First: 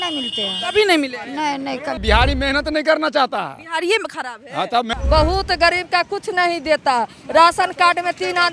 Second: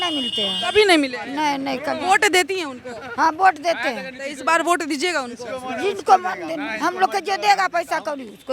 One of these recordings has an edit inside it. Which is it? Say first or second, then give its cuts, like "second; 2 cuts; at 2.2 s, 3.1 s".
first; 2 cuts; at 2.0 s, 4.9 s